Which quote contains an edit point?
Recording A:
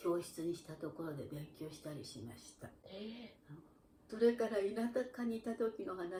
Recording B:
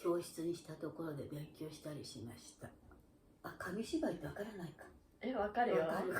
B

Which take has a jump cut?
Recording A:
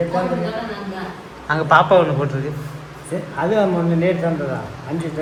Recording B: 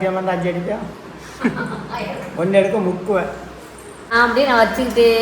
B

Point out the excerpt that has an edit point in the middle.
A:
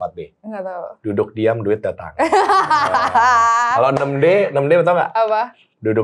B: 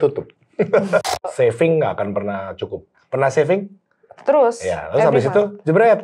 B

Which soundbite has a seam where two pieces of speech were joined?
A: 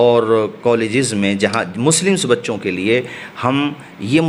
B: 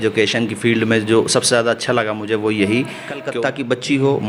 B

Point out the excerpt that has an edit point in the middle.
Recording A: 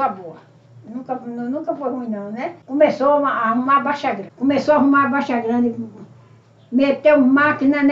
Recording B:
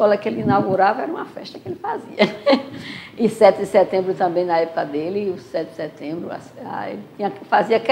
A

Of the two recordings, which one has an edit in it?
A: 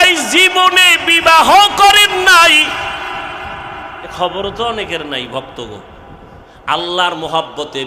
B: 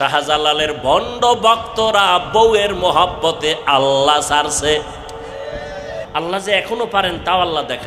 B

